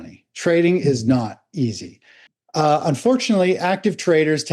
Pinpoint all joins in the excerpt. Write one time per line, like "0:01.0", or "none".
0:02.4